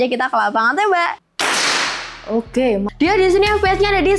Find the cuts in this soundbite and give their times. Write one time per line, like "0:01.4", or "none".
0:01.2
0:02.9